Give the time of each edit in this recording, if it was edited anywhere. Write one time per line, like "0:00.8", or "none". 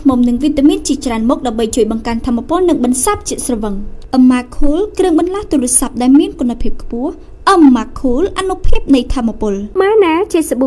0:09.6

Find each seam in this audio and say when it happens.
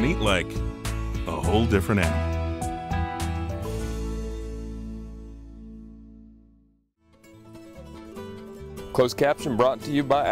0:07.2
0:08.5

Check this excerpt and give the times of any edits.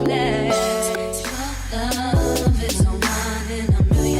0:01.2

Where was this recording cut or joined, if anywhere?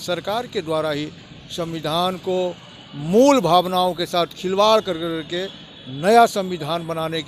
none

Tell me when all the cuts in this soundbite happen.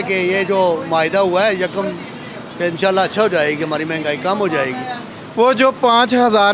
none

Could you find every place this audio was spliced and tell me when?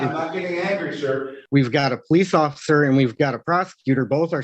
0:01.3

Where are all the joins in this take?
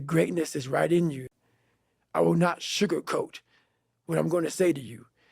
0:01.2

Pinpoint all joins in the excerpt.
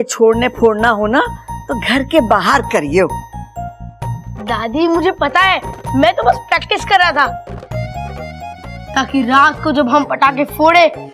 none

